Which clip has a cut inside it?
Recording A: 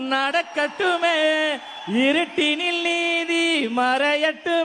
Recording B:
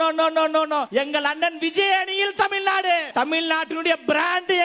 B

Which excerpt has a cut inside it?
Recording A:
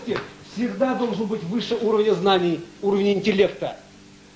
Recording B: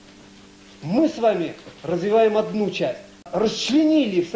B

